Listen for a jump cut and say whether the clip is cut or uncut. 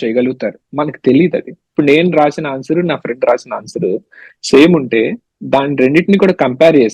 cut